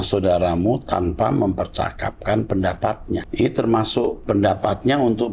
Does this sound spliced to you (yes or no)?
yes